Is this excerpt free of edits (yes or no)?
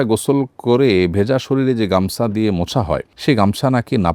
yes